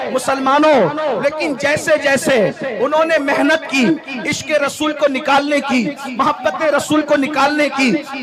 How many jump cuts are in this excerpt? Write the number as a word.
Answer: zero